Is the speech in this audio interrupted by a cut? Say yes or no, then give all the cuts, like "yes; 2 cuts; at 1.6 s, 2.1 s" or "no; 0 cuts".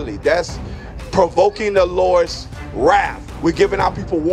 yes; 1 cut; at 3.3 s